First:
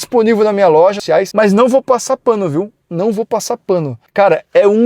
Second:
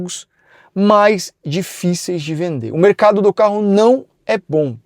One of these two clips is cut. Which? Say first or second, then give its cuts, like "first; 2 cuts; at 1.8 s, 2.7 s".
first; 2 cuts; at 1.1 s, 4.0 s